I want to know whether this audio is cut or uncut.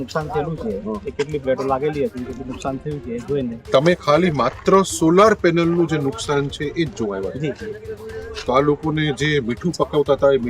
cut